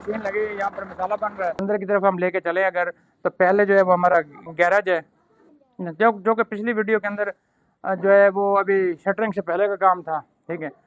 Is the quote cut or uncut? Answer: cut